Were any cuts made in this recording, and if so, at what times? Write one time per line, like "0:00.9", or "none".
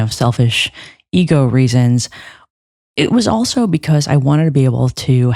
none